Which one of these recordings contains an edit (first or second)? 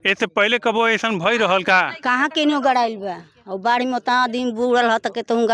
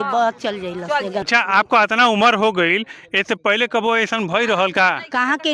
second